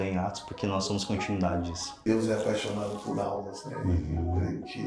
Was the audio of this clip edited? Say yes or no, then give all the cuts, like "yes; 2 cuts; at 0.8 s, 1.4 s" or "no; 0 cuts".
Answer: yes; 1 cut; at 2.0 s